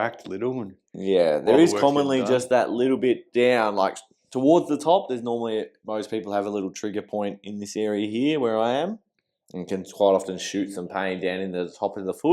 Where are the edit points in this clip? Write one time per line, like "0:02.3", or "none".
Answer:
none